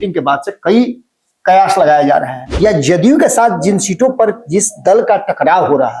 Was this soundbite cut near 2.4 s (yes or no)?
yes